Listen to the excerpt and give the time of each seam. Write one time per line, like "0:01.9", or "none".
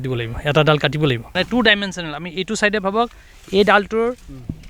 0:01.3